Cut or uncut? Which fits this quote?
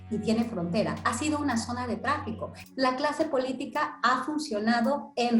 cut